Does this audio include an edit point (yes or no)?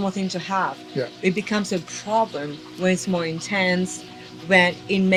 no